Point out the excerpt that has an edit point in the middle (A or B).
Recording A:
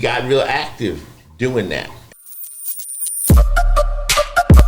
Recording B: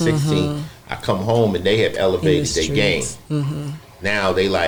A